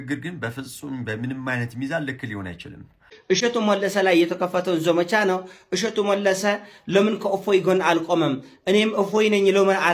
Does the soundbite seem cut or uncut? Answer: cut